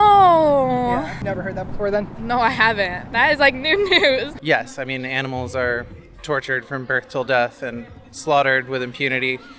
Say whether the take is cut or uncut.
cut